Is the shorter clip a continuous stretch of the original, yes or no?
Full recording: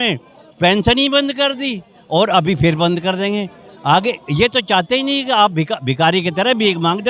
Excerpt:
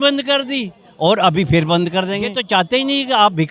no